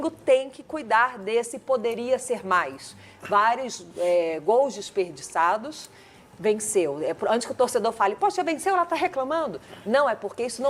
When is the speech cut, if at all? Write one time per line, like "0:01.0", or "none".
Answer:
none